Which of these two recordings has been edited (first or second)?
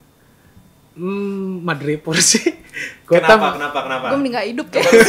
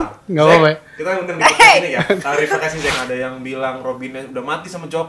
second